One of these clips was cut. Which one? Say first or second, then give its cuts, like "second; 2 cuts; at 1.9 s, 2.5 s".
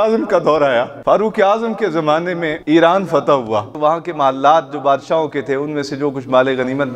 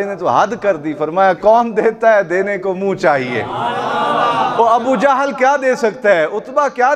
first; 3 cuts; at 0.9 s, 2.5 s, 3.7 s